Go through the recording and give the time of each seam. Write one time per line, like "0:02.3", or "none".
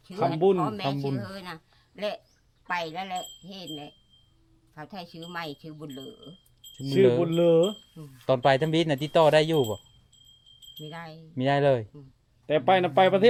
none